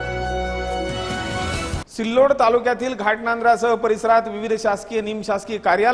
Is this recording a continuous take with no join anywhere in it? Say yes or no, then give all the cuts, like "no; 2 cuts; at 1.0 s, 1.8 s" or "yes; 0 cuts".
no; 1 cut; at 1.8 s